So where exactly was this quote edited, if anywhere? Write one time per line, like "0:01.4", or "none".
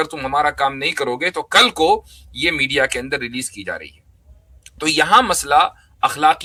none